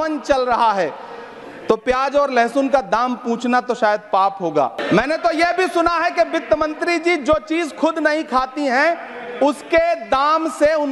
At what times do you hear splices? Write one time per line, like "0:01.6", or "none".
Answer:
0:04.8